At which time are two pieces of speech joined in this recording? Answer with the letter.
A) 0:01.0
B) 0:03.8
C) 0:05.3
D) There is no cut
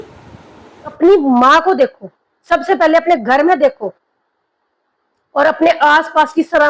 A